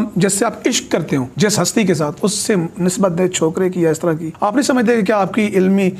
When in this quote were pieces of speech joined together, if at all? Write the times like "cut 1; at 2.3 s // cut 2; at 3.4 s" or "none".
cut 1; at 1.3 s // cut 2; at 4.3 s